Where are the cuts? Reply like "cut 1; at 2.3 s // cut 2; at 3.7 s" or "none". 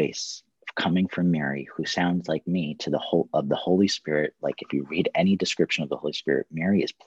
none